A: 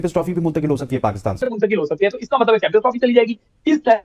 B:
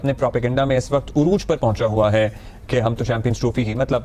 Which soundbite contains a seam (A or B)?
A